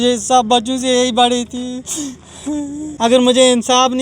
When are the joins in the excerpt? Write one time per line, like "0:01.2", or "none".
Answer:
0:02.9